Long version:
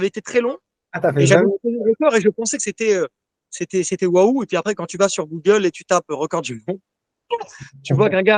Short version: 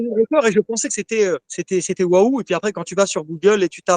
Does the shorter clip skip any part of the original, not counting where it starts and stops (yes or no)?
yes